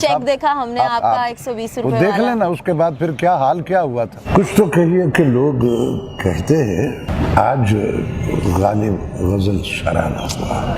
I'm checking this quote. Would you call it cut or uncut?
cut